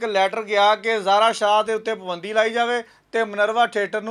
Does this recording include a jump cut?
no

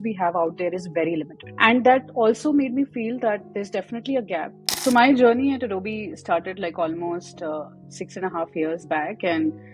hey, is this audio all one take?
no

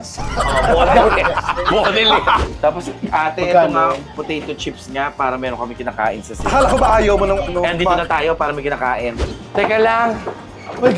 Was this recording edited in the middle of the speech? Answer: yes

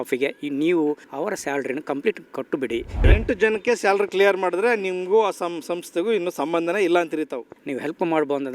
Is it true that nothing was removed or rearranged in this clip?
no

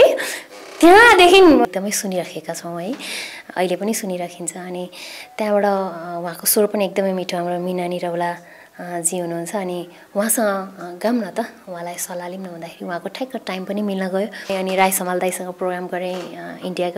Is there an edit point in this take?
yes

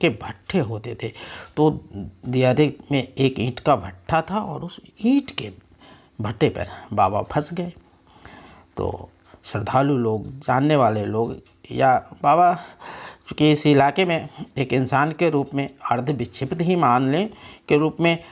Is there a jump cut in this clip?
no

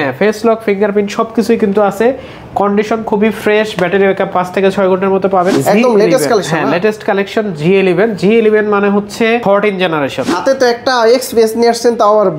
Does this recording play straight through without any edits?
no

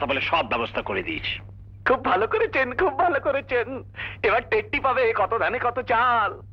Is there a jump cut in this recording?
no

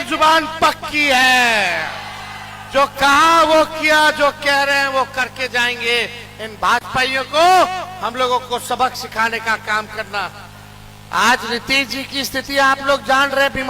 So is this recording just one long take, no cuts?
yes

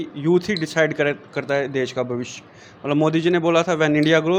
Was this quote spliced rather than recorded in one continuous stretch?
no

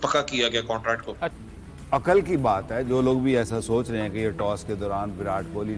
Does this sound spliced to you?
yes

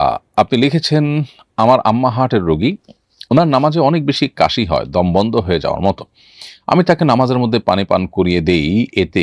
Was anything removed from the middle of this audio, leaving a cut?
no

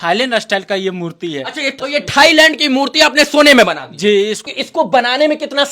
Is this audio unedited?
no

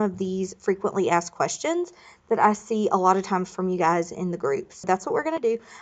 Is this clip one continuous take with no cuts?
no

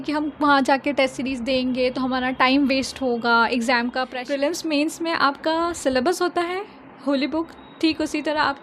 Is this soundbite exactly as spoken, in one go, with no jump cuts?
no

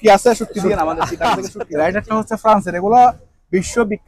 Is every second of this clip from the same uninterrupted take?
no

